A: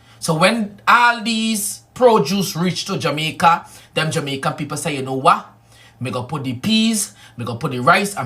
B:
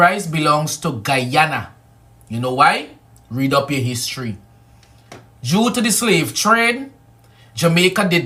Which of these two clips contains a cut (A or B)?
A